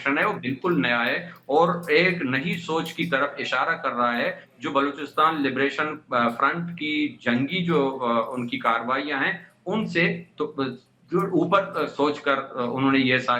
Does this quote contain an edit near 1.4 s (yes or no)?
no